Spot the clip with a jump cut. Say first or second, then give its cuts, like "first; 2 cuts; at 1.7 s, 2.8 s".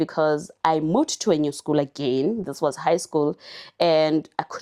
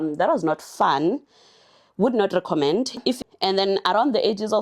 second; 1 cut; at 3.2 s